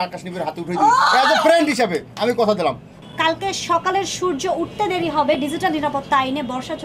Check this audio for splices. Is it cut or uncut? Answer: cut